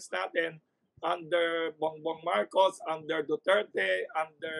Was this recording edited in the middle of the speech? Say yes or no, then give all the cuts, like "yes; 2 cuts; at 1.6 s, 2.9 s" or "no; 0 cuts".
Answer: no; 0 cuts